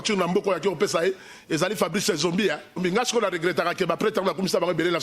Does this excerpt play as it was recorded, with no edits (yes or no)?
no